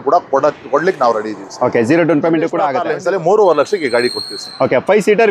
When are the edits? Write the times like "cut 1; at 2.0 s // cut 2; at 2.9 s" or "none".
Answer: cut 1; at 2.7 s